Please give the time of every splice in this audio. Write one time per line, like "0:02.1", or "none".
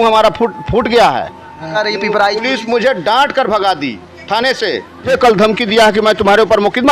0:01.7
0:05.1